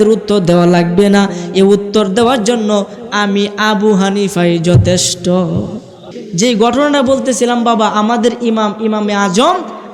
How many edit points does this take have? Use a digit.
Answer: 1